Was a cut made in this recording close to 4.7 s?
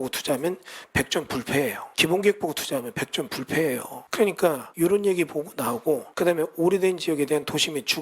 yes; 4 cuts; at 1.9 s, 4.0 s, 4.7 s, 6.1 s

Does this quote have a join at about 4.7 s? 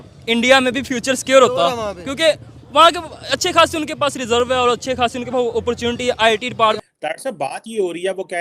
no; 1 cut; at 6.8 s

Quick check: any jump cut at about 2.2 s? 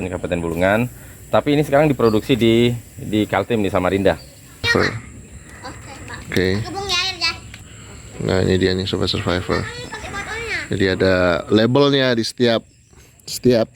no; 1 cut; at 4.7 s

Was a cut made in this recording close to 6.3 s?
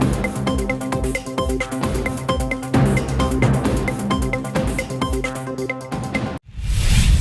yes; 1 cut; at 6.3 s

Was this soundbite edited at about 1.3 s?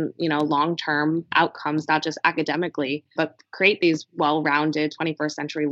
yes; 2 cuts; at 1.3 s, 3.0 s

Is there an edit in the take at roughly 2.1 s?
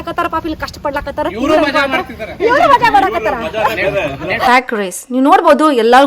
no; 1 cut; at 4.5 s

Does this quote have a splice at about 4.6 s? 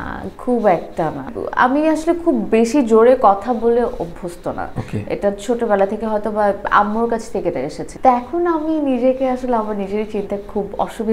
no; 2 cuts; at 1.3 s, 7.8 s

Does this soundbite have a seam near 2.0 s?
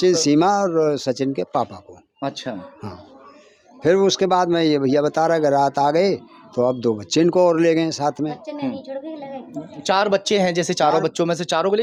no; 0 cuts

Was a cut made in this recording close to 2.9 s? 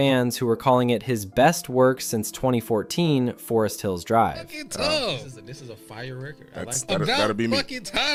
no; 0 cuts

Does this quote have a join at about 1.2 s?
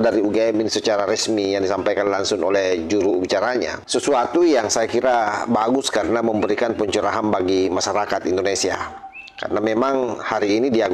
no; 1 cut; at 3.8 s

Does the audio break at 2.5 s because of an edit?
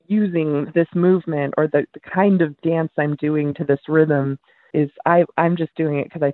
no; 1 cut; at 4.6 s

